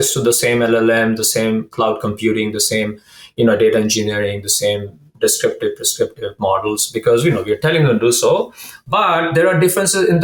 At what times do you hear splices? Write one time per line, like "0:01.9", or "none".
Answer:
none